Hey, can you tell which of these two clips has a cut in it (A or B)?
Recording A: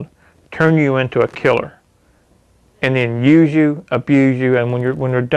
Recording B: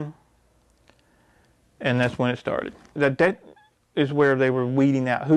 B